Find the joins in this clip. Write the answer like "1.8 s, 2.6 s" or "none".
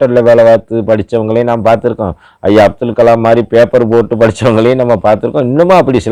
none